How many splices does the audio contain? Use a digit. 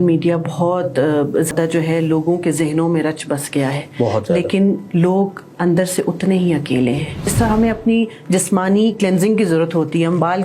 2